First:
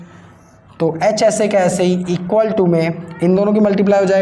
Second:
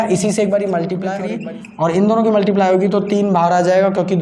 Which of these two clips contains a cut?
second; 1 cut; at 1.1 s

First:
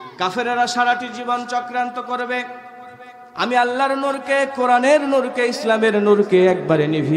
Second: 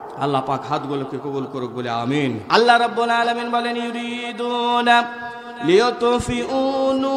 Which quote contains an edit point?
second; 1 cut; at 2.4 s

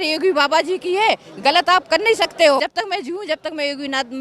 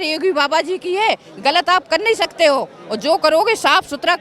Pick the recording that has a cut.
first; 1 cut; at 2.6 s

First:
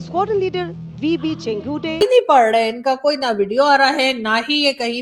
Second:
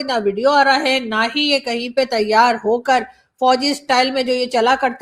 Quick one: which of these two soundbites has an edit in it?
first; 1 cut; at 2.0 s

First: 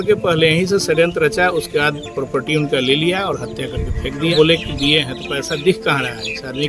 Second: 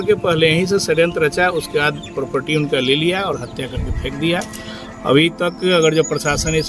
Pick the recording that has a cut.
first; 1 cut; at 4.3 s

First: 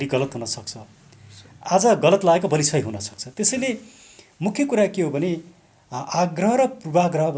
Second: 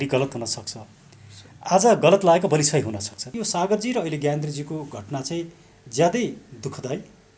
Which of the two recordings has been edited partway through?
second; 1 cut; at 3.4 s

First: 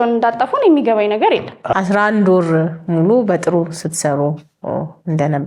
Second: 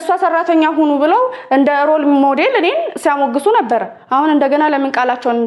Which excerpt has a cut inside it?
first; 1 cut; at 1.7 s

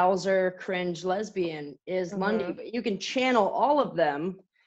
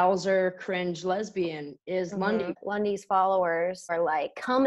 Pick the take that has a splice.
second; 2 cuts; at 2.6 s, 3.9 s

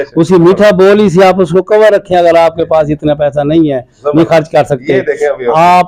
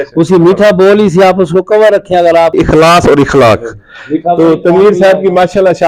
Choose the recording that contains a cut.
second; 1 cut; at 2.5 s

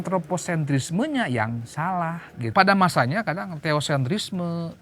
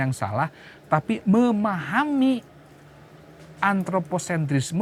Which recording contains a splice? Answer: first; 1 cut; at 2.5 s

